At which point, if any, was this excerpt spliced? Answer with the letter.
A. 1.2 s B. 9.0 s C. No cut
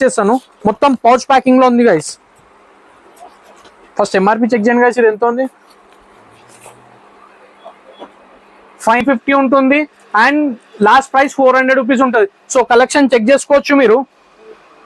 B